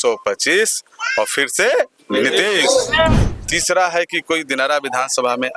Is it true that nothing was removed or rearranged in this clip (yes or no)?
no